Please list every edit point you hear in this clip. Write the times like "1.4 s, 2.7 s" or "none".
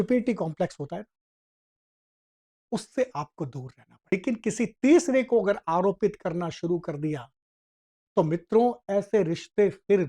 4.1 s